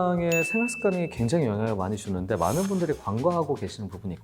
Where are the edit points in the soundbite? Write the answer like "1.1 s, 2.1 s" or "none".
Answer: none

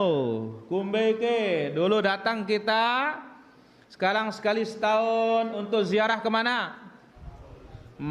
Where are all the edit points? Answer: none

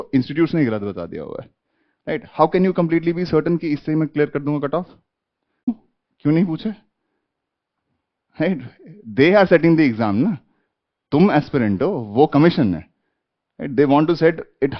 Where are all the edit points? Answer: 5.7 s

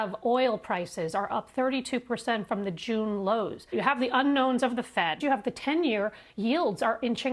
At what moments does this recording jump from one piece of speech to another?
3.7 s, 5.2 s

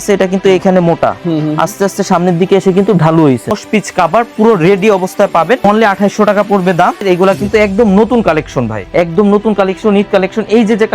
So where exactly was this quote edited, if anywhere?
3.5 s, 5.6 s, 7.0 s, 8.8 s

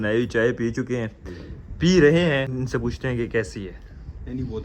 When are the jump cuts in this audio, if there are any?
2.5 s

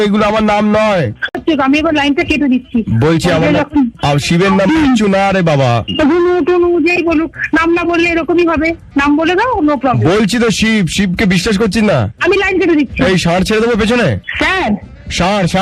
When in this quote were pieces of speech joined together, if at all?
1.3 s

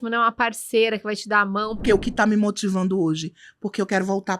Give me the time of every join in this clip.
1.8 s

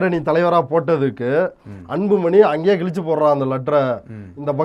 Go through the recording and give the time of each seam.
none

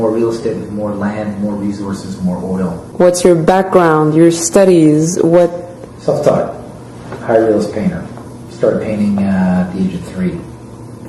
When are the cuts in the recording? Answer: none

